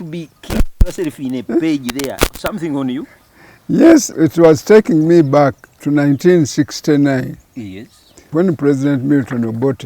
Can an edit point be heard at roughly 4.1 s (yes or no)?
yes